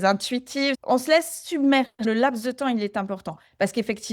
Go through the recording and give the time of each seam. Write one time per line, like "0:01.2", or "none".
0:00.8
0:02.0

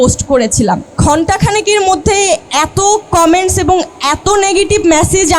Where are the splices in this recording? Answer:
0:01.0
0:02.5

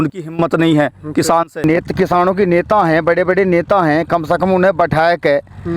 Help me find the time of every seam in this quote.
0:01.6

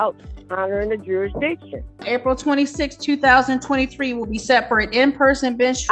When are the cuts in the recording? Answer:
0:02.0

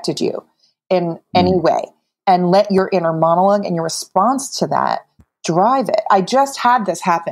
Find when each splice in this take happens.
0:02.2

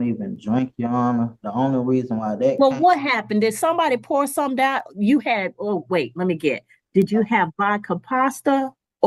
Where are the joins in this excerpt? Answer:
none

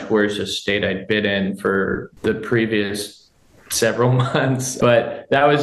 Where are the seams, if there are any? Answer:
0:02.1
0:04.7

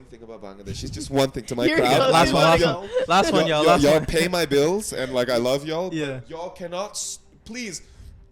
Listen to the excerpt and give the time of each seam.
none

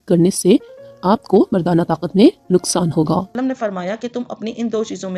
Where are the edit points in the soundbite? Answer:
0:03.3

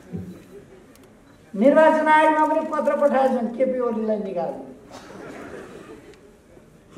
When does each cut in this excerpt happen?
none

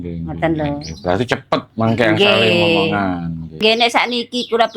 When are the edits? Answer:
0:03.6

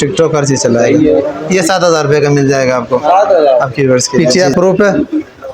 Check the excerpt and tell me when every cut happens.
0:04.3

